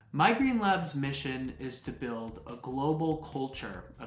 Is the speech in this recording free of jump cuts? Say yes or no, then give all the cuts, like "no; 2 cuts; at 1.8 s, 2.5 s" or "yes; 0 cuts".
yes; 0 cuts